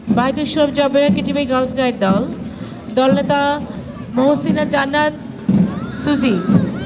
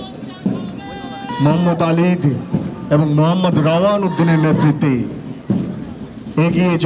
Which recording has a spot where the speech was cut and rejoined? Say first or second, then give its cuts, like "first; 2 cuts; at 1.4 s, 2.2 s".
second; 1 cut; at 1.3 s